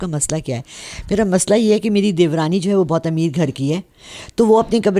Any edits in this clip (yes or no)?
no